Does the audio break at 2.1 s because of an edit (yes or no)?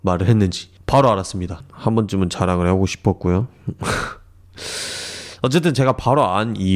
no